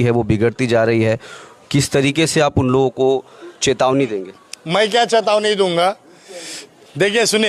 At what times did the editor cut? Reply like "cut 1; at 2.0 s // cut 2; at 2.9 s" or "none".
none